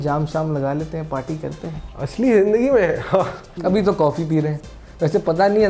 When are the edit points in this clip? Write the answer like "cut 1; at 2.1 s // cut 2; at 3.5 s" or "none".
cut 1; at 1.8 s // cut 2; at 3.7 s